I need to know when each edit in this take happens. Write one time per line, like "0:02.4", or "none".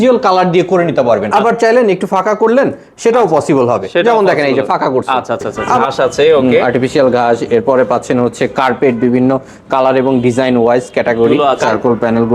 0:01.3
0:05.8
0:11.3